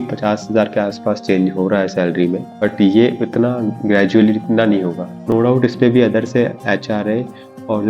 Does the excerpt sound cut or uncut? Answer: cut